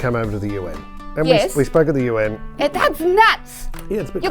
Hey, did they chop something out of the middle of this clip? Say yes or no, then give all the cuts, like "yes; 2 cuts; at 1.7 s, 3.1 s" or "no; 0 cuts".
no; 0 cuts